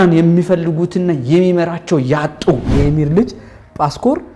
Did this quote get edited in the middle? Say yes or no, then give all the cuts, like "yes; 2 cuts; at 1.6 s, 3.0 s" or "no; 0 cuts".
yes; 1 cut; at 2.6 s